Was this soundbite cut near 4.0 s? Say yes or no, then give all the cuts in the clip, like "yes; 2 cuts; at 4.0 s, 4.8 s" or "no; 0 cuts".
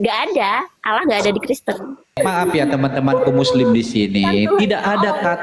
no; 1 cut; at 2.2 s